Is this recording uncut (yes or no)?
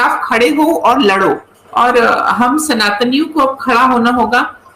no